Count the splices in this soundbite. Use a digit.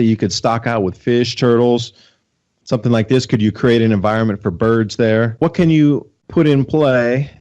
2